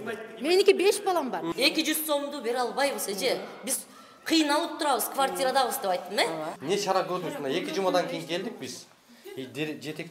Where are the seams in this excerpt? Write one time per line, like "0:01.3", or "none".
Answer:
0:01.5
0:06.5